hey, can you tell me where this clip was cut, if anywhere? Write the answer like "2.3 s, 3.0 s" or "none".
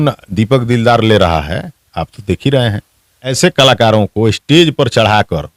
3.3 s

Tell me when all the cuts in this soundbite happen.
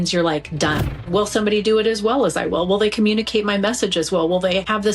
0.9 s

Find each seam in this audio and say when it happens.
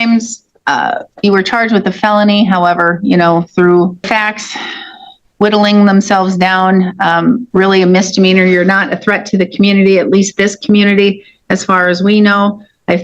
4.1 s, 7.4 s

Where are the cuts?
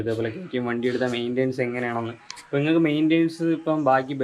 none

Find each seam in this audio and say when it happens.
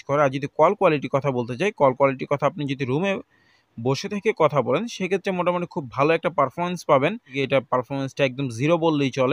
7.3 s

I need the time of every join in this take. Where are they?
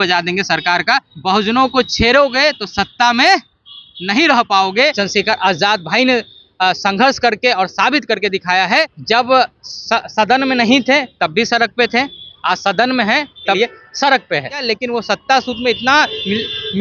1.1 s, 4.9 s, 9.0 s, 13.6 s, 14.6 s

